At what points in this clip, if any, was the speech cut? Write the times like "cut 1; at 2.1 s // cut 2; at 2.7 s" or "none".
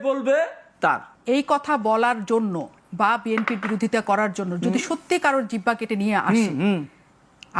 cut 1; at 1.1 s

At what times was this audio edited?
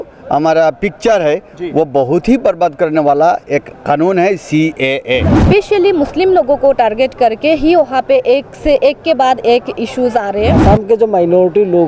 cut 1; at 5.4 s // cut 2; at 10.6 s

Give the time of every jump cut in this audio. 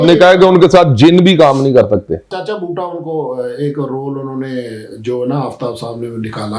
cut 1; at 2.3 s

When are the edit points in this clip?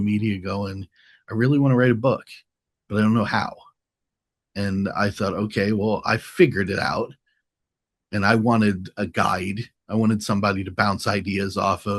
none

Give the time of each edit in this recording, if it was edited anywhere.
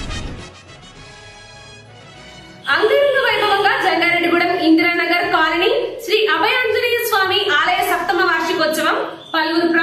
cut 1; at 1.0 s

